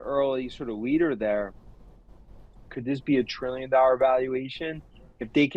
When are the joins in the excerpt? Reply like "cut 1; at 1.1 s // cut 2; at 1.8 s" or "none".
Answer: cut 1; at 2.7 s